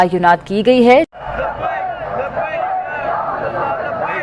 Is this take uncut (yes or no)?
no